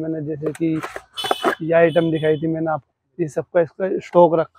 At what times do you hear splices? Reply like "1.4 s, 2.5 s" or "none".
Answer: 2.9 s